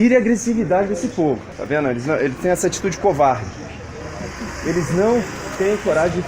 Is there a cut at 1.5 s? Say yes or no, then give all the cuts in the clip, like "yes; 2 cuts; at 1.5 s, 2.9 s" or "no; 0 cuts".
yes; 1 cut; at 1.5 s